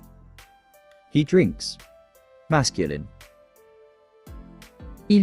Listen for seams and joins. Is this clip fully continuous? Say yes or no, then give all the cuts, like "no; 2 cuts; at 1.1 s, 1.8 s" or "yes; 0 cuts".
no; 1 cut; at 1.1 s